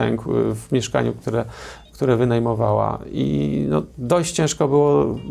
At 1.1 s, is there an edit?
no; 0 cuts

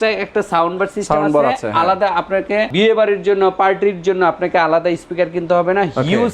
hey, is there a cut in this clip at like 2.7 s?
yes; 1 cut; at 2.7 s

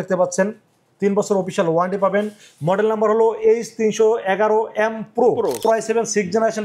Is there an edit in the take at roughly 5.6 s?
yes; 1 cut; at 5.6 s

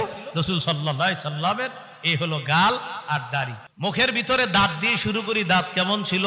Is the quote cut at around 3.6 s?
yes; 1 cut; at 3.6 s

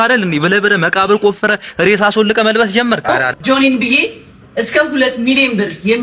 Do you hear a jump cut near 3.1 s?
yes; 1 cut; at 3.1 s

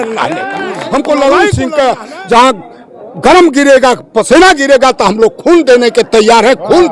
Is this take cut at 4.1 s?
no; 1 cut; at 1.5 s

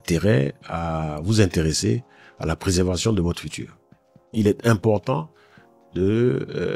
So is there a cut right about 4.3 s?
yes; 1 cut; at 4.3 s

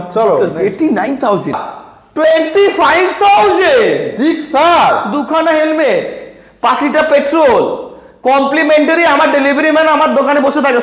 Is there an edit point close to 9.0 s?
no; 1 cut; at 1.6 s

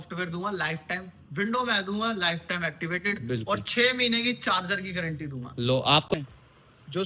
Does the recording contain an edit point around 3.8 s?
no; 1 cut; at 6.1 s

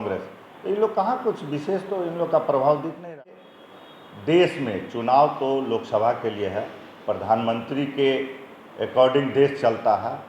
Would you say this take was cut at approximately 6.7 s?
no; 1 cut; at 3.2 s

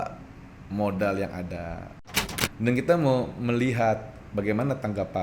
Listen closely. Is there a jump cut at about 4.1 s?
no; 1 cut; at 2.0 s

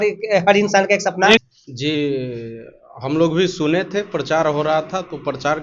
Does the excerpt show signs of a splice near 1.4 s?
yes; 1 cut; at 1.4 s

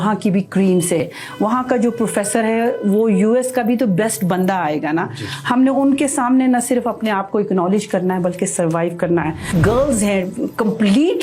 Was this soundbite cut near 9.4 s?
yes; 2 cuts; at 1.0 s, 9.4 s

